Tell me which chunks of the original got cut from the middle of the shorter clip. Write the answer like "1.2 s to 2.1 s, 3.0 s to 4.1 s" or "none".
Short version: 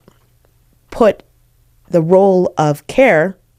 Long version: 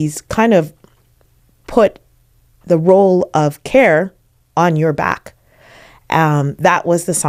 none